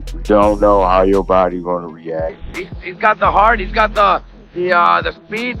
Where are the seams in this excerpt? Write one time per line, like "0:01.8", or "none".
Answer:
0:02.4